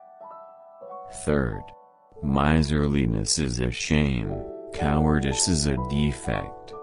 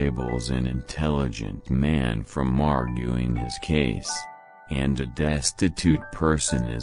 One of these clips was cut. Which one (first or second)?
first